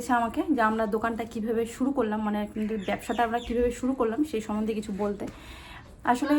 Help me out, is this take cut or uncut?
uncut